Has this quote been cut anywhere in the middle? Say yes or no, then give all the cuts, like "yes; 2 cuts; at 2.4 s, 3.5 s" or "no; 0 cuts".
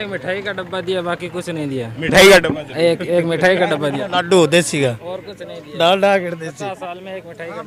no; 0 cuts